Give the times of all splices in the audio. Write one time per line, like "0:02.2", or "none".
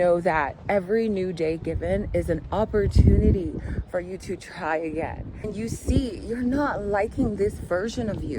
0:05.5